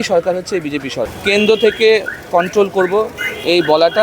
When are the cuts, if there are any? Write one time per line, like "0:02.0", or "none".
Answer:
0:01.1